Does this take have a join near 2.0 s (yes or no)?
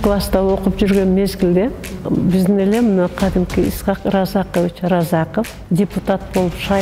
yes